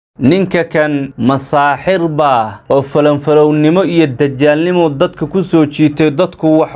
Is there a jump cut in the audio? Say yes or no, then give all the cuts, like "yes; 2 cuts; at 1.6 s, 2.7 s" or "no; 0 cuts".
yes; 1 cut; at 1.1 s